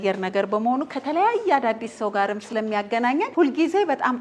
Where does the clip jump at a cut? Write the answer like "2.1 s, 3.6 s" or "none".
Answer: 2.4 s, 3.3 s